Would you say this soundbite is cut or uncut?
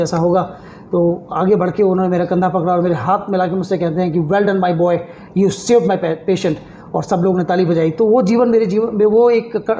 uncut